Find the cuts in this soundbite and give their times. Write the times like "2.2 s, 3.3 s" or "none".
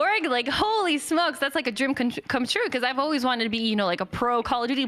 none